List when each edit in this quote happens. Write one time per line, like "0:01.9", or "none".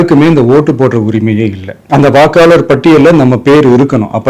0:01.7